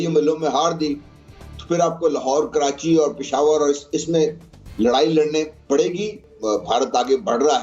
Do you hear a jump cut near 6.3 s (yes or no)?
yes